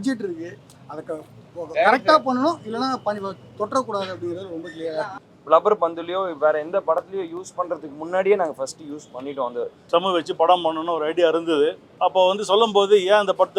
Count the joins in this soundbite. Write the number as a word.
three